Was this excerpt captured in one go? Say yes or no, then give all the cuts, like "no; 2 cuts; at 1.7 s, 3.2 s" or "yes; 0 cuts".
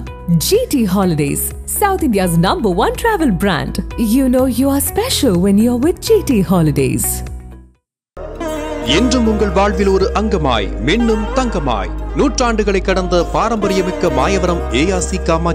yes; 0 cuts